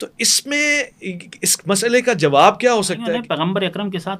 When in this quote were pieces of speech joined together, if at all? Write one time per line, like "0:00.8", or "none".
0:03.1